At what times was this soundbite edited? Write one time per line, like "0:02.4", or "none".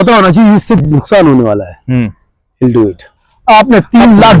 0:03.3